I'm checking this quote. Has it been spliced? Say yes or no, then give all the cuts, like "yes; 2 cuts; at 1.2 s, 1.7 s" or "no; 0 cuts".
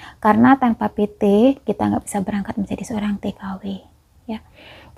no; 0 cuts